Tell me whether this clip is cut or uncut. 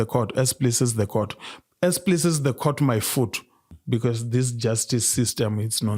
cut